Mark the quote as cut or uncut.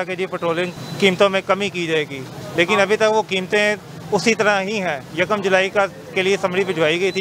uncut